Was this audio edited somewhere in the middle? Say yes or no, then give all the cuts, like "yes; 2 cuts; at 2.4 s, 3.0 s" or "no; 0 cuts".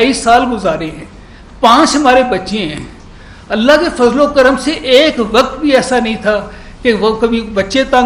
no; 0 cuts